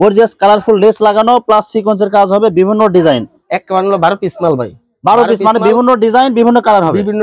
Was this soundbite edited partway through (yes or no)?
yes